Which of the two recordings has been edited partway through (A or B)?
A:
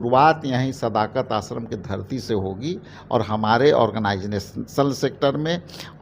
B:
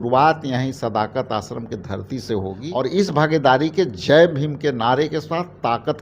B